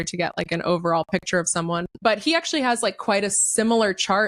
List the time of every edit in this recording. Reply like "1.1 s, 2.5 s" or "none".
1.9 s